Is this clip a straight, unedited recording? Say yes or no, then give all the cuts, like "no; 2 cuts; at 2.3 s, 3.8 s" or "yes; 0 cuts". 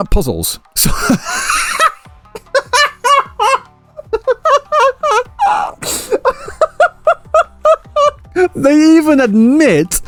yes; 0 cuts